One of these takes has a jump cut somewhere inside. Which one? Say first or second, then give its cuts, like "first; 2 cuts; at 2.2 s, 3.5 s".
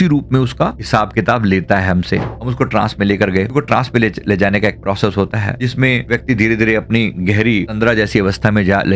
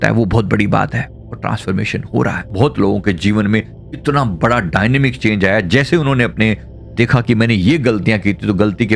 first; 1 cut; at 2.3 s